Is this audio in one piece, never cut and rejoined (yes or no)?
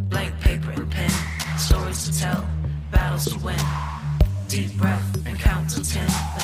yes